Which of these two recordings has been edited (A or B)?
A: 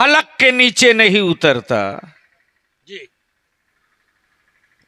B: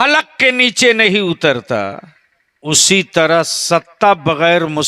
B